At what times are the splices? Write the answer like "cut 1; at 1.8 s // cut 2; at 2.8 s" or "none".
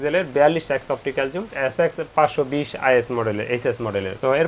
none